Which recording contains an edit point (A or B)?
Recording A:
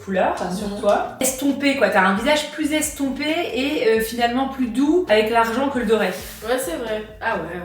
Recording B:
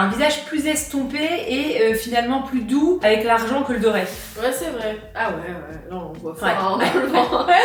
A